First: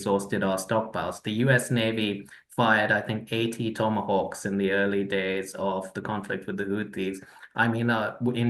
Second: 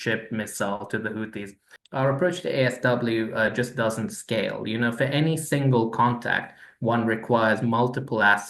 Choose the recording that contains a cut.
second; 1 cut; at 1.8 s

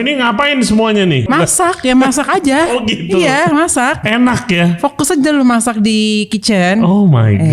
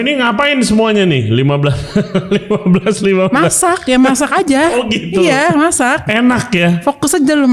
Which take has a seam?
first; 1 cut; at 1.3 s

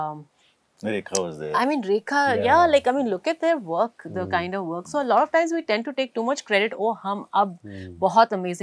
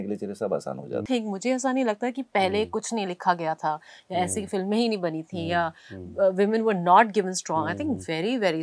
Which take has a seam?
second; 1 cut; at 1.0 s

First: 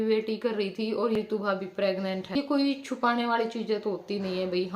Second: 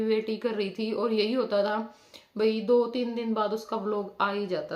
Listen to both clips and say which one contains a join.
first; 2 cuts; at 1.2 s, 2.4 s

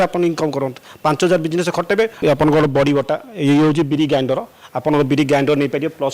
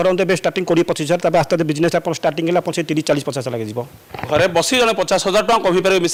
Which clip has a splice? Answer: first; 1 cut; at 2.1 s

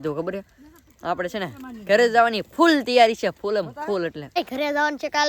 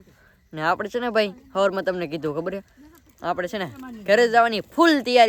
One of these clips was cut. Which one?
first; 1 cut; at 4.4 s

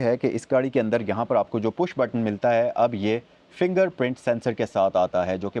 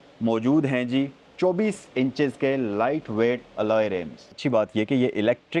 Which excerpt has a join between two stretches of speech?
second; 1 cut; at 4.3 s

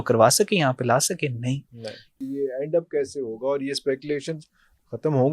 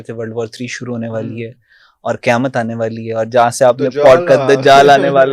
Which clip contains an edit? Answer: first; 1 cut; at 2.2 s

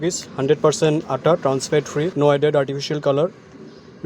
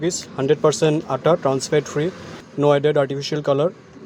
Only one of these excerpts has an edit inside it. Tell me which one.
first; 1 cut; at 2.1 s

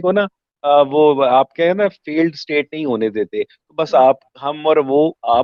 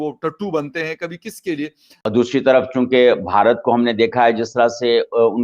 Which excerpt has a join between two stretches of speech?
second; 1 cut; at 2.0 s

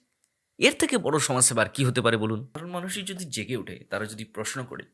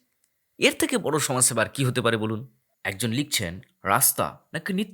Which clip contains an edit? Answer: first; 1 cut; at 2.6 s

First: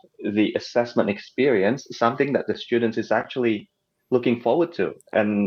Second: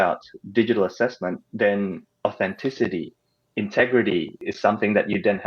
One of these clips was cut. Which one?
second; 2 cuts; at 1.4 s, 4.4 s

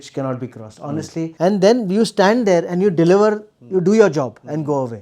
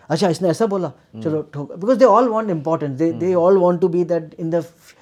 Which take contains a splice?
first; 1 cut; at 1.3 s

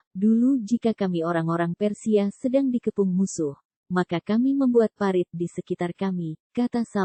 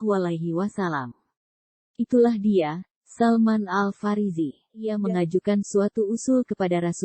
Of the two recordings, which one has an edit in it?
second; 1 cut; at 4.9 s

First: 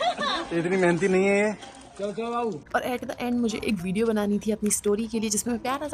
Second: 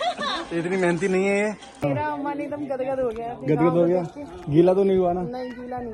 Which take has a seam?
second; 1 cut; at 1.8 s

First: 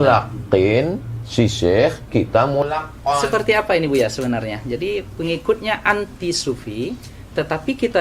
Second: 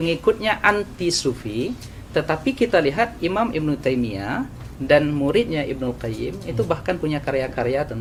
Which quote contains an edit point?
first; 1 cut; at 2.6 s

